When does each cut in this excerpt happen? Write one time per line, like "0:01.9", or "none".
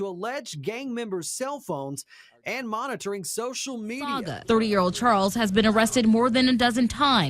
0:04.3